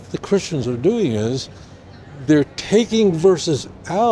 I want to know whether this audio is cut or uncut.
uncut